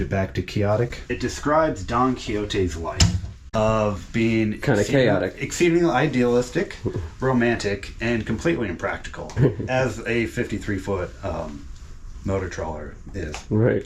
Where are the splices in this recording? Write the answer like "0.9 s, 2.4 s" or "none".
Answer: 1.0 s, 3.3 s, 9.4 s